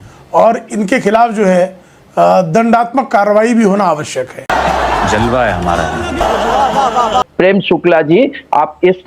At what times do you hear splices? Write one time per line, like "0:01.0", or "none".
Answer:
0:07.3